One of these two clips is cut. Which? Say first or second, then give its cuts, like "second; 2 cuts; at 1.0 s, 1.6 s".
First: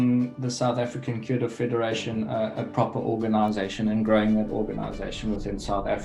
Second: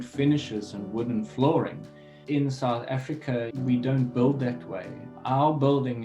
second; 1 cut; at 2.2 s